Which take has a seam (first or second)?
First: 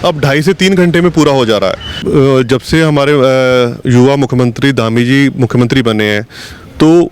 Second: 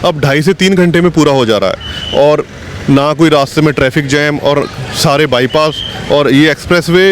first